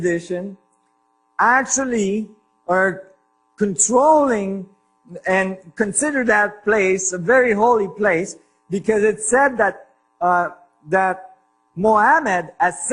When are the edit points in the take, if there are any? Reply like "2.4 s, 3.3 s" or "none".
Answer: 3.6 s